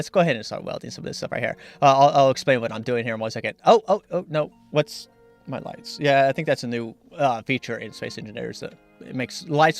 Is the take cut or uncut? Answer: cut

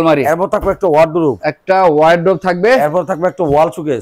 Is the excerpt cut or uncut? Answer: uncut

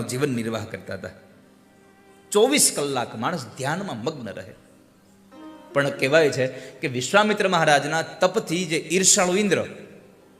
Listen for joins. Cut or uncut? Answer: cut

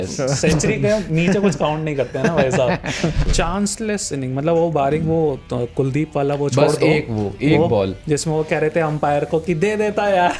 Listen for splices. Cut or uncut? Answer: cut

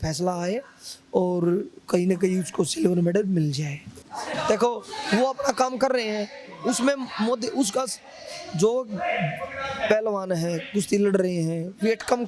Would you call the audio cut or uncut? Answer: cut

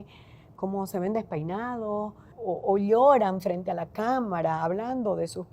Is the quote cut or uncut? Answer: cut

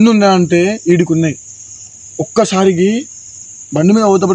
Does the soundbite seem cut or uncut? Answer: uncut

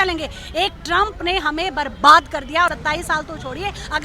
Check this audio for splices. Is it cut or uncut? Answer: cut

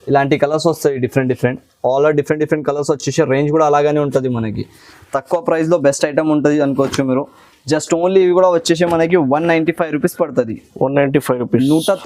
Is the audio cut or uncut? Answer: uncut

